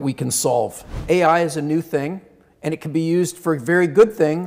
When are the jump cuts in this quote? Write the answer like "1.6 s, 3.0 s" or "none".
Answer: 1.0 s